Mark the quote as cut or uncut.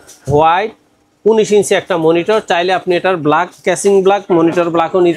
uncut